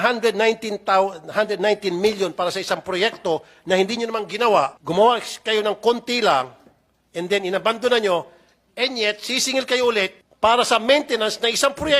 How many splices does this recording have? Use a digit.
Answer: 2